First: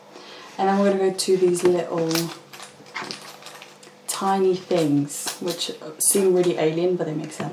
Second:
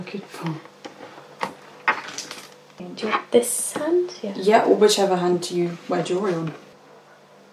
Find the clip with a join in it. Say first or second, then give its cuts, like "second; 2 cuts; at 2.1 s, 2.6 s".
second; 2 cuts; at 2.8 s, 6.6 s